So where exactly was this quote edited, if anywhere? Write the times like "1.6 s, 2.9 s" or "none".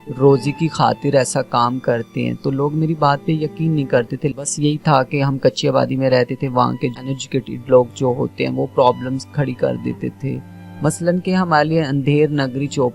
4.3 s, 7.0 s